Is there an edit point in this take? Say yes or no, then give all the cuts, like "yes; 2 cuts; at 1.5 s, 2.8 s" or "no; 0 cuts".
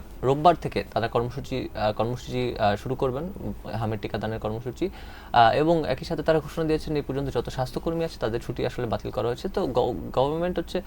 no; 0 cuts